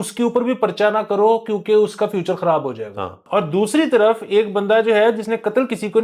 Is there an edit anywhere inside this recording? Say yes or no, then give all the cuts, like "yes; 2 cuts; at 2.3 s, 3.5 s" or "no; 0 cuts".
yes; 1 cut; at 3.2 s